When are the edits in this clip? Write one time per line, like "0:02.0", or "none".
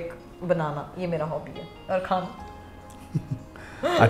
none